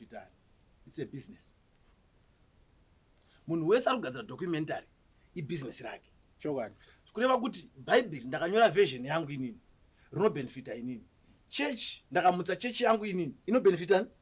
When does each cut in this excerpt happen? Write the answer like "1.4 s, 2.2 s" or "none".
none